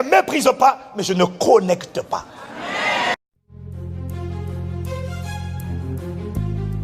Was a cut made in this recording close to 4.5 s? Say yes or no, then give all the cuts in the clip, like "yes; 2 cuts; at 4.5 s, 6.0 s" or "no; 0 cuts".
no; 1 cut; at 3.1 s